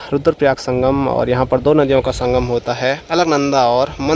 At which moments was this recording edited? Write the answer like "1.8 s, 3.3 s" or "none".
none